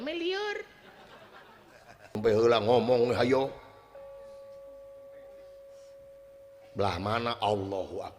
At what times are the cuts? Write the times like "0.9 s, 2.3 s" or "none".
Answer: 2.2 s

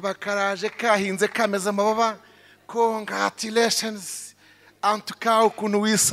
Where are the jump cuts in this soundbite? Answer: none

